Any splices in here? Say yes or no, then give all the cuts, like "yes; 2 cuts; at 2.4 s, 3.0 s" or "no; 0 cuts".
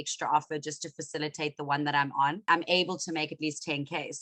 yes; 1 cut; at 2.4 s